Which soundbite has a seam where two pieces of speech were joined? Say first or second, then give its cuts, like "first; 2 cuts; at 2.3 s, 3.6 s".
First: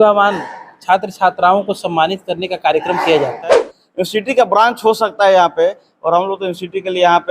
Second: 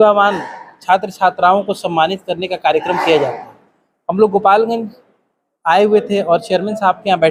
first; 1 cut; at 3.8 s